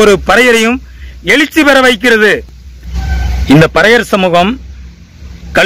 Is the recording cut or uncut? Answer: uncut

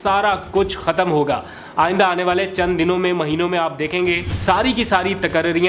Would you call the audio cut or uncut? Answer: cut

